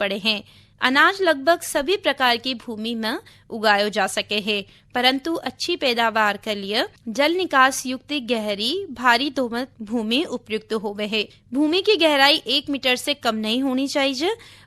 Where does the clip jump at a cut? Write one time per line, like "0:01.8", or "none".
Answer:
0:07.0
0:09.8
0:11.4

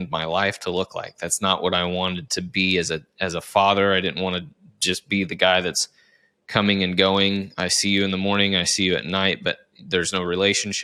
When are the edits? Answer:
none

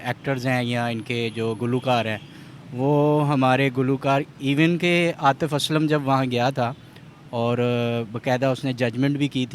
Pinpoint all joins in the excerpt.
none

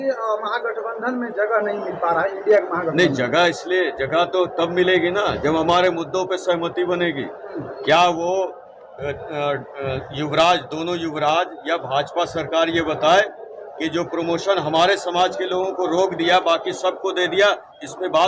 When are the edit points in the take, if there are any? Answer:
none

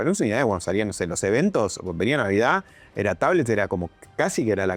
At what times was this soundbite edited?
none

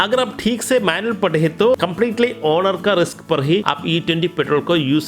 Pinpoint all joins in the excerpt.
0:03.7

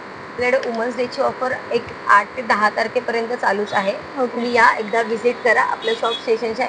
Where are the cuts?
none

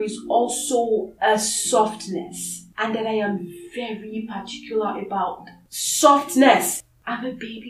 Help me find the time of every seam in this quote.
none

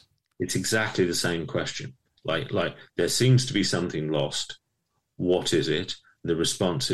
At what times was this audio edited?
none

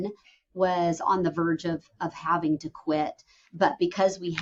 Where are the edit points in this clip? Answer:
none

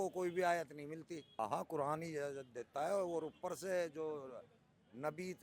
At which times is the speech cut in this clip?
0:01.4

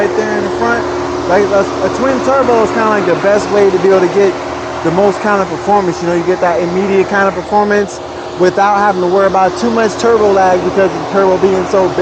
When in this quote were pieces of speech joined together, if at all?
none

